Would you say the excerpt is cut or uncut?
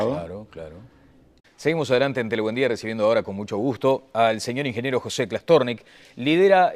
uncut